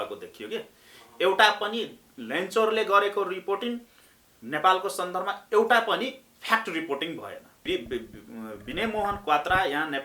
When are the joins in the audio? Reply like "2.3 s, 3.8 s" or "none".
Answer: 7.5 s